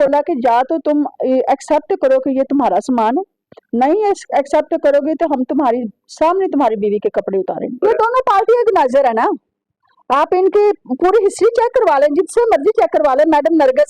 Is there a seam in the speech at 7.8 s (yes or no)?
yes